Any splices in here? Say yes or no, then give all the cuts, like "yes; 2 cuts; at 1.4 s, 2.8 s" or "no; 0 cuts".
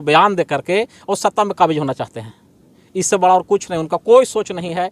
no; 0 cuts